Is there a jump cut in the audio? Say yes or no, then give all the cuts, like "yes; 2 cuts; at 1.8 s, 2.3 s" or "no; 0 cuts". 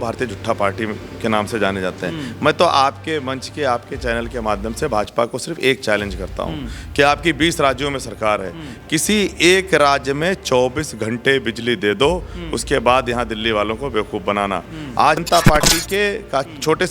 yes; 1 cut; at 15.2 s